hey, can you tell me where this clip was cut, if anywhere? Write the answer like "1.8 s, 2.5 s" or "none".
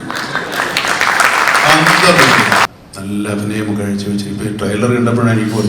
2.7 s

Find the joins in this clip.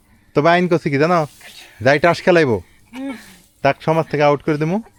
none

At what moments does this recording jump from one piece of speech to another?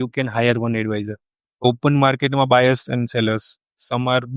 1.6 s

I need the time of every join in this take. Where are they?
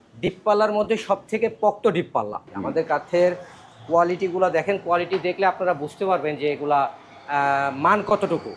2.5 s

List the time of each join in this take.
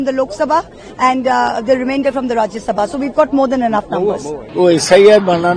4.4 s

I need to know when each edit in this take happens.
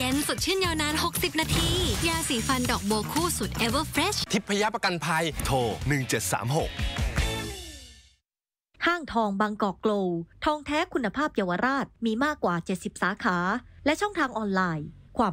4.2 s

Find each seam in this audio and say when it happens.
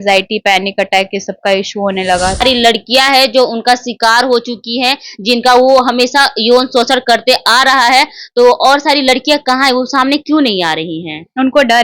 2.4 s

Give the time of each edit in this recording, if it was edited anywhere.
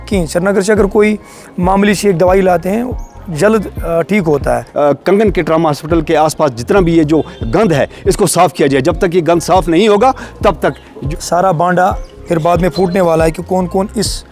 4.5 s, 11.0 s

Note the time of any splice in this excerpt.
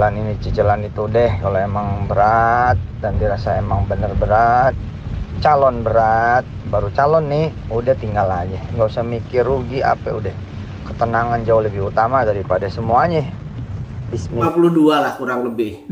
14.4 s

